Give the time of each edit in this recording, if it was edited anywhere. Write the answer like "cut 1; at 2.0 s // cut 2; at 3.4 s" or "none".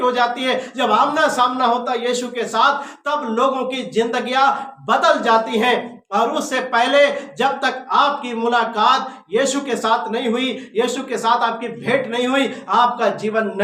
none

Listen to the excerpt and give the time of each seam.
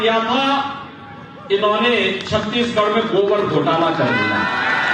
none

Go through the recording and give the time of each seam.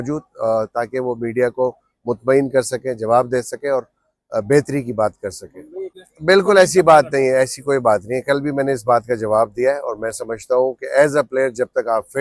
cut 1; at 6.0 s

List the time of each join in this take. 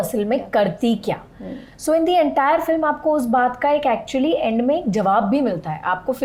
none

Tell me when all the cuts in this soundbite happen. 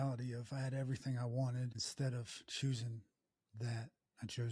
cut 1; at 1.8 s

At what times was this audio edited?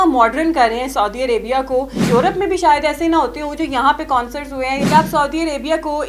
cut 1; at 2.0 s // cut 2; at 4.8 s

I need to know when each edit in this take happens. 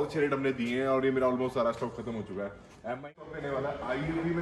cut 1; at 3.1 s

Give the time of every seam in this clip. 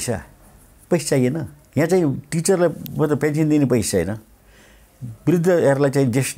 cut 1; at 1.6 s

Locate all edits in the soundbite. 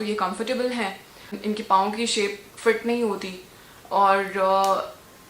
cut 1; at 1.3 s

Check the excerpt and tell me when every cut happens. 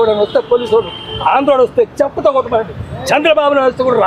none

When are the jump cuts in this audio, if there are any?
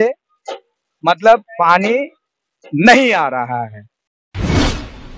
cut 1; at 4.0 s

